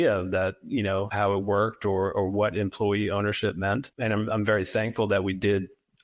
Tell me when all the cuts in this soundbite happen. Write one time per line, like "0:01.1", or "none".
0:01.1
0:03.9